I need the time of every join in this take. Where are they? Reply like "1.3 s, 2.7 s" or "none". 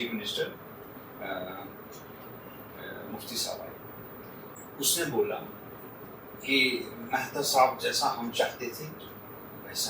4.6 s